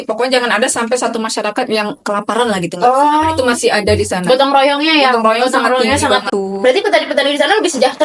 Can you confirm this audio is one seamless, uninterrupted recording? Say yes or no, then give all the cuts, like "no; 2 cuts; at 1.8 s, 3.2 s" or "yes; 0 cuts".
no; 1 cut; at 6.3 s